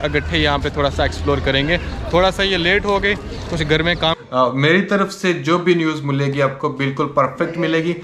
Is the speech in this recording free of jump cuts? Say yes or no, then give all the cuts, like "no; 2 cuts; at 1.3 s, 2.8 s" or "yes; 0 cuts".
no; 1 cut; at 4.1 s